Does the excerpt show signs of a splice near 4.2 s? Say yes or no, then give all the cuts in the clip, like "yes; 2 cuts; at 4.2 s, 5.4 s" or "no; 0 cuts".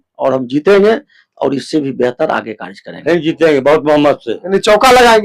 no; 1 cut; at 2.9 s